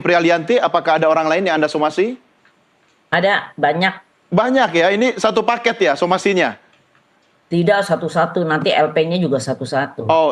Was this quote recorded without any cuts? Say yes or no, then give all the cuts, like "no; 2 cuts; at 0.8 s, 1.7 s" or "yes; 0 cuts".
yes; 0 cuts